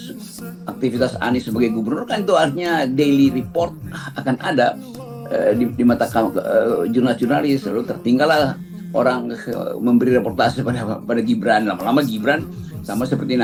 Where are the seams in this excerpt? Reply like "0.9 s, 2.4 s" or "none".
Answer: none

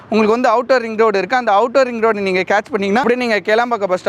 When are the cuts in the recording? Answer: none

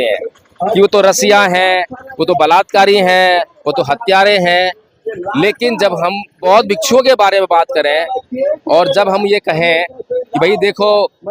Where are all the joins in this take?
6.4 s

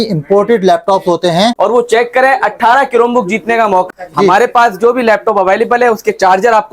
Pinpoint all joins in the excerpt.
1.5 s, 3.9 s

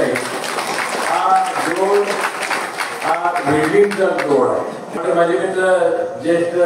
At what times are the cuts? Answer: 5.0 s

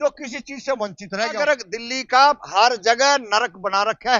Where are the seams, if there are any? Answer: 1.4 s

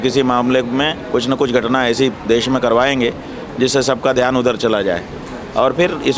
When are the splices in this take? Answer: none

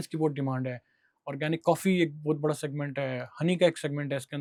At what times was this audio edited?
none

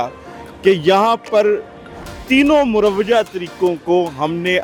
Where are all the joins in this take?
none

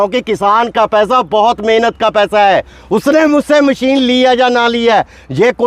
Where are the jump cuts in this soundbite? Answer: none

